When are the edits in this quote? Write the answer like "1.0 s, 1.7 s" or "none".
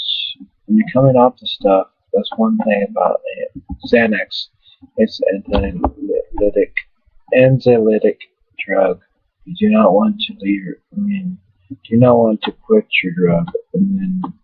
12.7 s